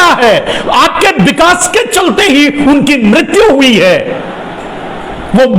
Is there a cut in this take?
no; 0 cuts

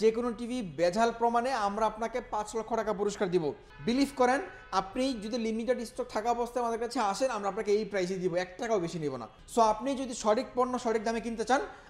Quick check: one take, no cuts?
no; 2 cuts; at 3.7 s, 9.3 s

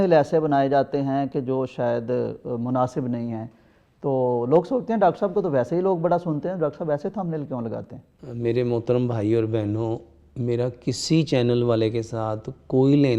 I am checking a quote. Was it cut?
no; 0 cuts

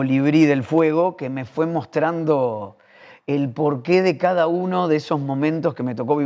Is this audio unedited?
yes; 0 cuts

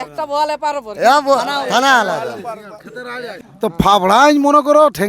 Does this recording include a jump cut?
yes; 1 cut; at 3.5 s

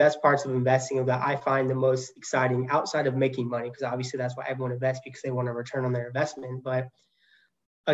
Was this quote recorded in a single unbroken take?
yes; 0 cuts

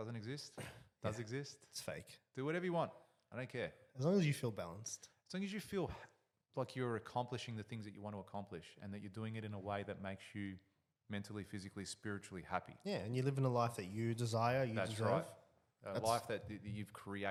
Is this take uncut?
yes; 0 cuts

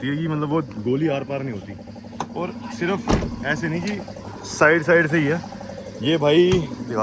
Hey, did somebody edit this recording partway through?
no; 0 cuts

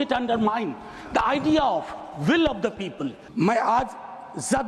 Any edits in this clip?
yes; 1 cut; at 3.3 s

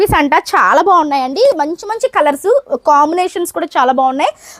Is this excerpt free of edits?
yes; 0 cuts

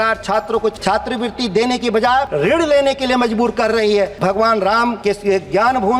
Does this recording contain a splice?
yes; 4 cuts; at 0.8 s, 2.3 s, 4.1 s, 5.0 s

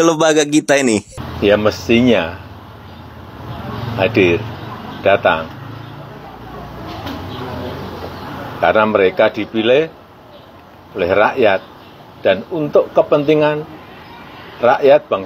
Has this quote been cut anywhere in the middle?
yes; 1 cut; at 1.2 s

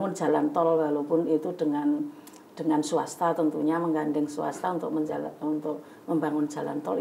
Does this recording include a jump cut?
no; 0 cuts

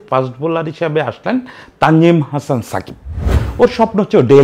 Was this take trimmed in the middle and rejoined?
yes; 1 cut; at 3.4 s

